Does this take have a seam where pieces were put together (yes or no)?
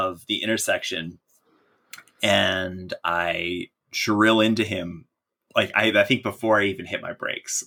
no